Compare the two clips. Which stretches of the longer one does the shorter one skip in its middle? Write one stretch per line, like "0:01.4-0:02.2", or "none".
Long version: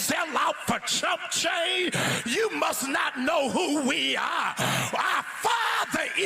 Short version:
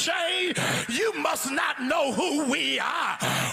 none